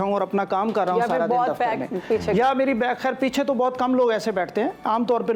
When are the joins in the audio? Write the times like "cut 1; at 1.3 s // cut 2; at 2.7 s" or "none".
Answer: none